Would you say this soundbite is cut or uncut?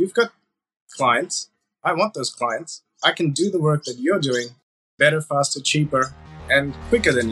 uncut